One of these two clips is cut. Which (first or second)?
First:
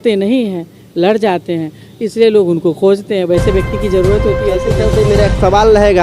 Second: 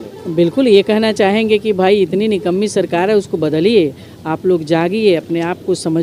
first